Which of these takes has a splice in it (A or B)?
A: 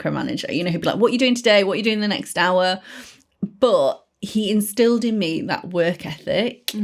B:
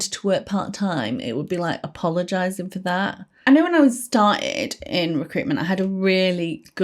B